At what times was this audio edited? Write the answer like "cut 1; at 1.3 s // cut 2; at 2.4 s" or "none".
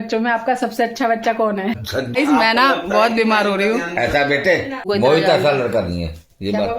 cut 1; at 2.2 s // cut 2; at 4.8 s